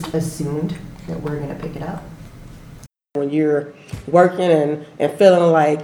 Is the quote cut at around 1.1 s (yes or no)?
no